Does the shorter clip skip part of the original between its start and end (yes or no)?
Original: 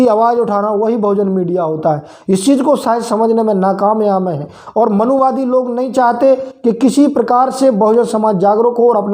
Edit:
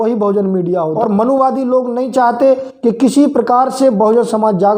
yes